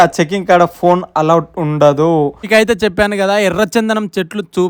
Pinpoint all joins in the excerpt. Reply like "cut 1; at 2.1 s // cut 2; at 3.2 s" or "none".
cut 1; at 2.4 s